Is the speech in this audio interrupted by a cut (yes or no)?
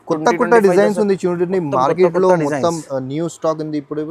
no